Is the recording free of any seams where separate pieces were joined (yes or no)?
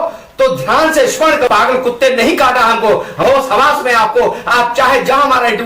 no